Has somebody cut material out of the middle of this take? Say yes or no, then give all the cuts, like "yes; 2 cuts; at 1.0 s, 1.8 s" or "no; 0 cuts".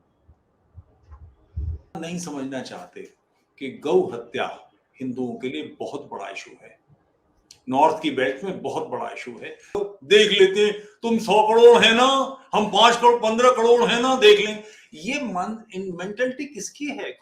yes; 2 cuts; at 2.0 s, 9.8 s